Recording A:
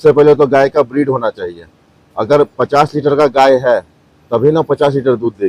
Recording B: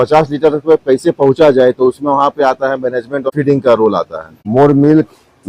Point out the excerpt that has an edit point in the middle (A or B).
B